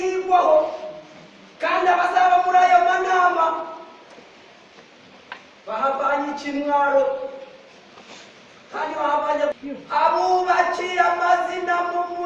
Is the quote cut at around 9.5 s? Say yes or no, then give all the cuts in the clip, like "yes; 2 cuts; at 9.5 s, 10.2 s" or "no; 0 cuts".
yes; 1 cut; at 9.5 s